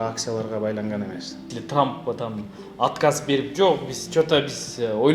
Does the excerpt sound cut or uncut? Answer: cut